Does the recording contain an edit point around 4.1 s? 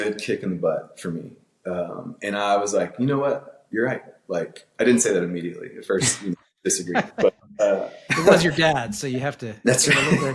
no; 0 cuts

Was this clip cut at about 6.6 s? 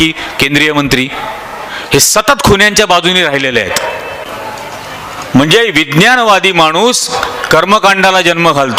no; 1 cut; at 4.2 s

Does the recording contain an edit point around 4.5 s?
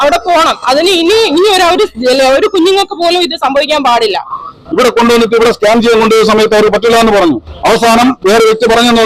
yes; 1 cut; at 4.5 s

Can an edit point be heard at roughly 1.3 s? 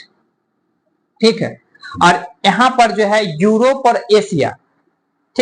no; 0 cuts

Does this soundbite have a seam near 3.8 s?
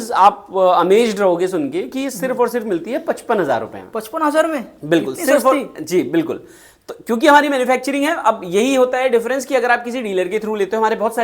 no; 0 cuts

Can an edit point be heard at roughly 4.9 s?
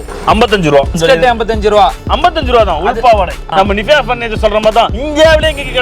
no; 2 cuts; at 0.9 s, 3.5 s

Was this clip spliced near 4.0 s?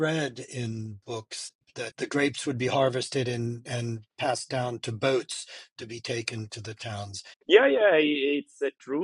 no; 2 cuts; at 1.6 s, 7.3 s

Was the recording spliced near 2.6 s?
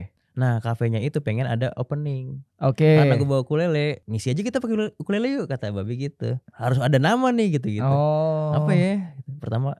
no; 2 cuts; at 4.1 s, 6.5 s

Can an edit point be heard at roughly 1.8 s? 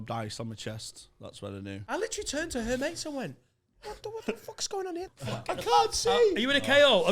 yes; 2 cuts; at 1.8 s, 5.1 s

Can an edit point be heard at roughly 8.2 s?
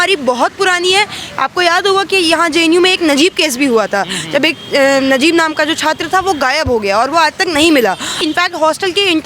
yes; 1 cut; at 8.2 s

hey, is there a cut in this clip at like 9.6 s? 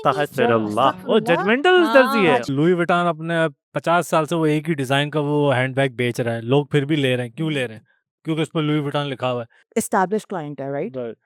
yes; 2 cuts; at 2.5 s, 9.6 s

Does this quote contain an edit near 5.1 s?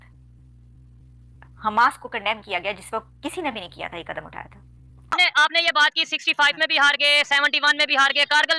yes; 1 cut; at 5.1 s

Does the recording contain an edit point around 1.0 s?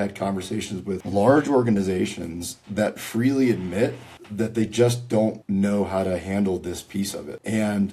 yes; 1 cut; at 1.0 s

